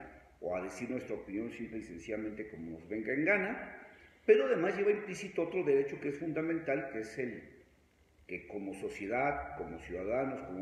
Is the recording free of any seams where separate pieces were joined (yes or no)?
yes